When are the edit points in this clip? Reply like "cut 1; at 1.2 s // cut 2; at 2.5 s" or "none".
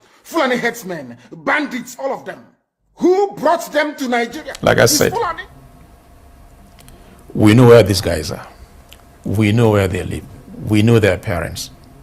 cut 1; at 4.4 s

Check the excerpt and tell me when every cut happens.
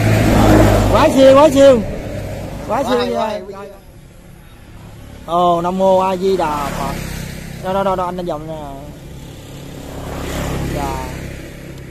cut 1; at 3.5 s

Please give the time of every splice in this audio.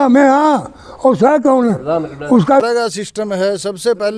cut 1; at 2.6 s

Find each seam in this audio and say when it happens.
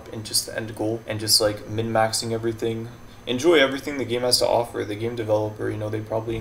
cut 1; at 1.1 s

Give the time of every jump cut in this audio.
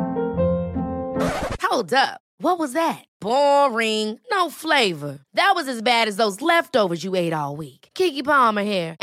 none

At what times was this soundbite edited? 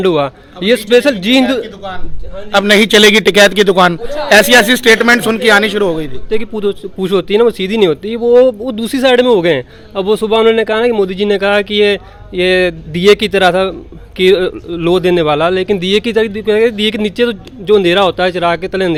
none

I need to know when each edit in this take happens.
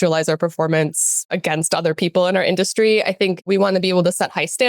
cut 1; at 1.3 s // cut 2; at 3.5 s

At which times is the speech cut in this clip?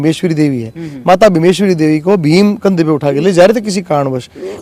none

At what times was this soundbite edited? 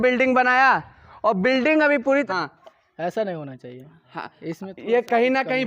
cut 1; at 2.3 s

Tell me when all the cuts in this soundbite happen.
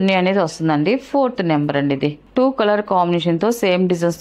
cut 1; at 2.2 s

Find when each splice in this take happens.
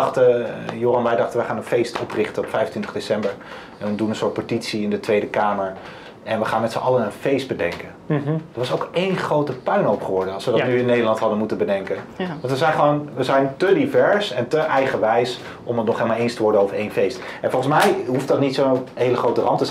none

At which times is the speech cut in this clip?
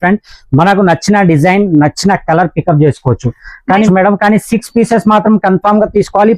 cut 1; at 3.9 s

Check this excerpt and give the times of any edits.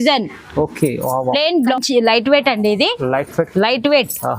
cut 1; at 1.7 s

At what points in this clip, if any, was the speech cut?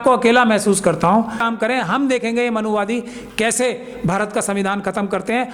cut 1; at 1.4 s

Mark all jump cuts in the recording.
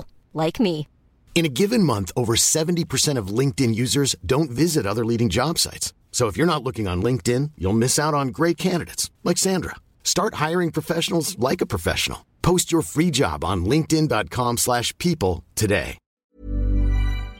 cut 1; at 16.0 s

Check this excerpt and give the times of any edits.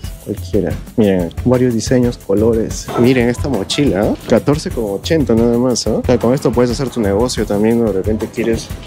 cut 1; at 2.8 s

